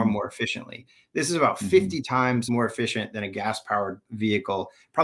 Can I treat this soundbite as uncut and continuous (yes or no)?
no